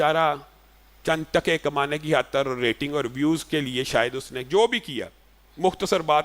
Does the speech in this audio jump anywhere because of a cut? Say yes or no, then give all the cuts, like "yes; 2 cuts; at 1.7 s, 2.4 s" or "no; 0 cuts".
no; 0 cuts